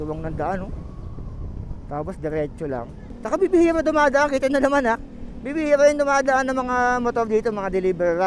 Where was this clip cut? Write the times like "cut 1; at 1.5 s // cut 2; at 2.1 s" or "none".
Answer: cut 1; at 3.0 s